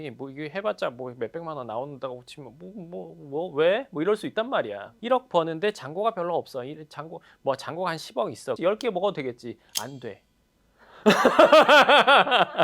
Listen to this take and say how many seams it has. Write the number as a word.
two